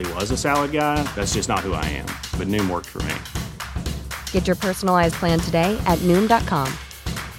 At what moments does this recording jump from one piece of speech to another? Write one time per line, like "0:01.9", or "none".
none